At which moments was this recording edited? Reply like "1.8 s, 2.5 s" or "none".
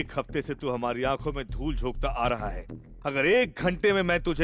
none